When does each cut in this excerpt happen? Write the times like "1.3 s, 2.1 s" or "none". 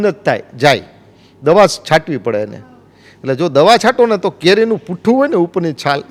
none